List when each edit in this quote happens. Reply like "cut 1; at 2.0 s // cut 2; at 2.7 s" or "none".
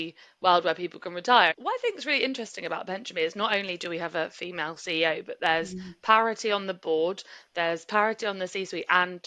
cut 1; at 1.6 s